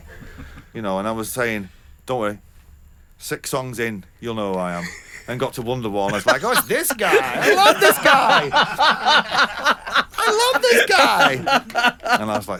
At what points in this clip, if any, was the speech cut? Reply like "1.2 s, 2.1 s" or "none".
none